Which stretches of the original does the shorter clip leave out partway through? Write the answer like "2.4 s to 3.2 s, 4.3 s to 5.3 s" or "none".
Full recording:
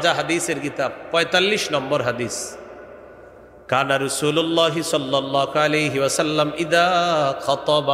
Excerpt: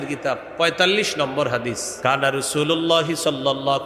2.4 s to 3.5 s

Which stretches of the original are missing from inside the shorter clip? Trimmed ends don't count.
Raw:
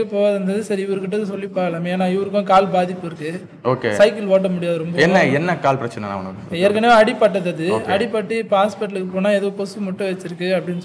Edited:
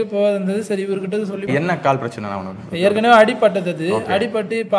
1.5 s to 5.3 s

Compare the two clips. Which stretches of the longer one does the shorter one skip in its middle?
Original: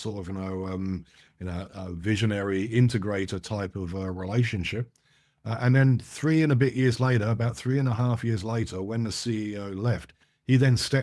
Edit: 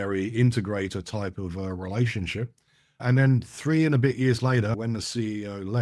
5.4 s to 5.6 s, 7.3 s to 8.9 s

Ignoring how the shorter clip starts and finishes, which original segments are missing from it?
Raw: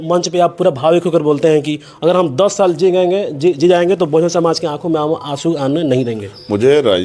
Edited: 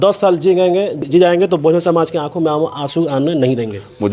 3.4 s to 3.5 s

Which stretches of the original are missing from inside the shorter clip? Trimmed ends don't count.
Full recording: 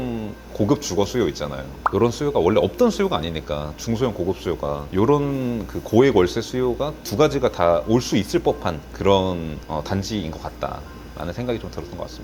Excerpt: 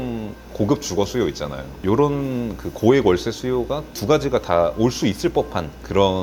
1.7 s to 4.8 s

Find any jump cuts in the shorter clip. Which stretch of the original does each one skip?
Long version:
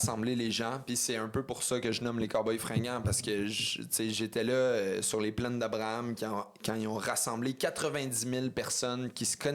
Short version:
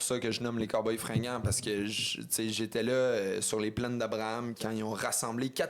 6.2 s to 6.6 s

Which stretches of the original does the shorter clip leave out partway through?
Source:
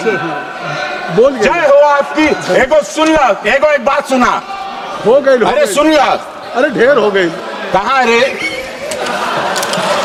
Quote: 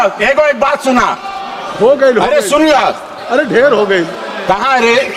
none

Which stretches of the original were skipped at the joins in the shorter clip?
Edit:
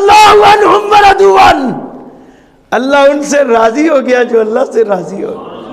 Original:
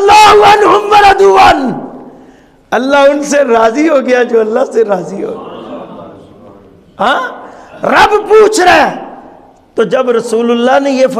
none

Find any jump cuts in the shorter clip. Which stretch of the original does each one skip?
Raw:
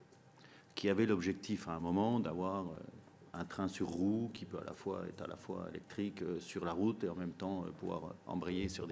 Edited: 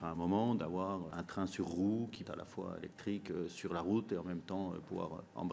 2.8 s to 3.4 s, 4.4 s to 5.1 s

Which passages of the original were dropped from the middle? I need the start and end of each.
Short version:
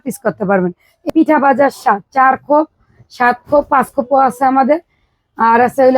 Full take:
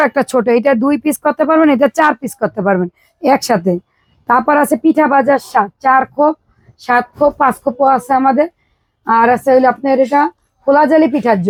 3.3 s to 4.8 s

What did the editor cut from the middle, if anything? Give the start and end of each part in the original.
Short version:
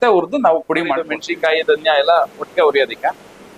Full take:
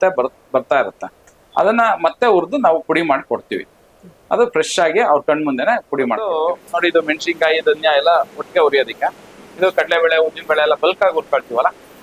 3.3 s to 7.1 s

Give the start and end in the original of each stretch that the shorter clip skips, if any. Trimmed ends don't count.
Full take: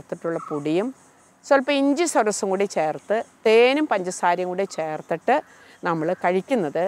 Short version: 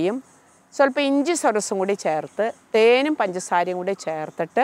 none

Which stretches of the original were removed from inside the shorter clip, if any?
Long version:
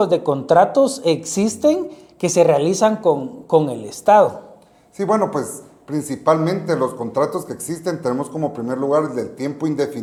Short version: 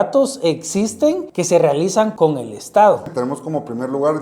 1.9 s to 2.2 s, 3.0 s to 3.4 s, 4.4 s to 8.0 s

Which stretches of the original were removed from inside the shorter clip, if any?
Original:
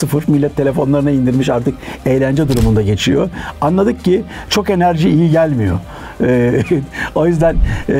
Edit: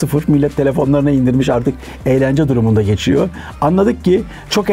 none

